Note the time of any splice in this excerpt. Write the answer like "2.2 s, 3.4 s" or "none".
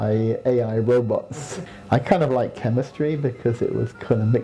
1.6 s